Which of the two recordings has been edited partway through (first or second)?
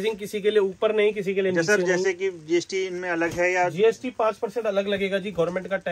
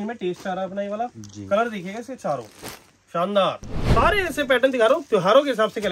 second